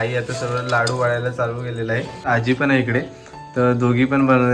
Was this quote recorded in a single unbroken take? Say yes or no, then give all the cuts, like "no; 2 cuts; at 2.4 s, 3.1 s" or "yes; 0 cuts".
no; 1 cut; at 2.2 s